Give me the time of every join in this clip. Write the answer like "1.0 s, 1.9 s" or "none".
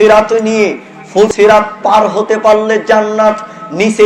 1.3 s